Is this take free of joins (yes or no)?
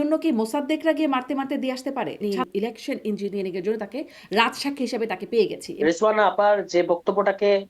no